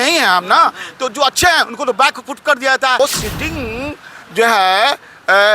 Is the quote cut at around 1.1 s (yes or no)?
no